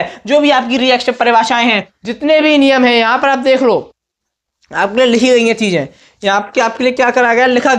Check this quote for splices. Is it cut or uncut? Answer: cut